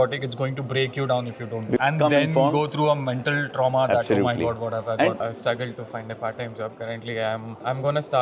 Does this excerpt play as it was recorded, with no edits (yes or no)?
no